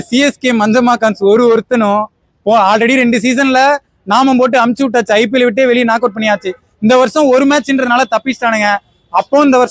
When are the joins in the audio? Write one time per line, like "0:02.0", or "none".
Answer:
none